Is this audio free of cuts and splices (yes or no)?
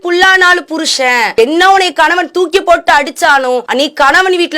no